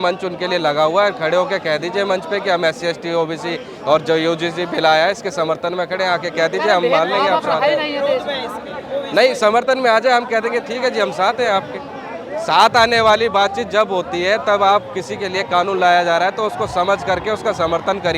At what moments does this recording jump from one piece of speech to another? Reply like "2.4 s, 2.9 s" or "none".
none